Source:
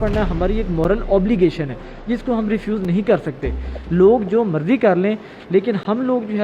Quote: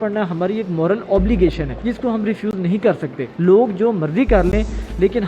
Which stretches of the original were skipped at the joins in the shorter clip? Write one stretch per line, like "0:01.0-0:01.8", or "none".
0:01.7-0:01.9
0:03.4-0:03.7